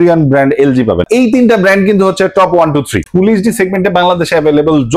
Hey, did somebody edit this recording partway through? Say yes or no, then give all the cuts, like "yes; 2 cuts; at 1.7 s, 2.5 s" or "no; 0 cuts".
yes; 2 cuts; at 1.1 s, 3.1 s